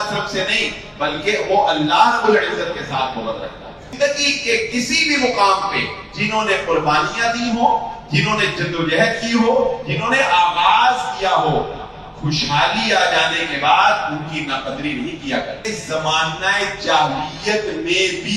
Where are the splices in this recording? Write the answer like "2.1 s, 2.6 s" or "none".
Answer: 3.9 s, 15.6 s